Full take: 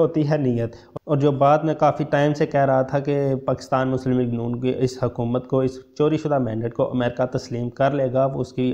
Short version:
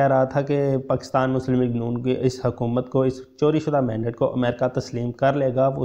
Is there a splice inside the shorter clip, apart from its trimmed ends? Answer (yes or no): no